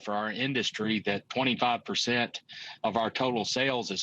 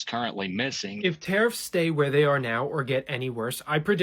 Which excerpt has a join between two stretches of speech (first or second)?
second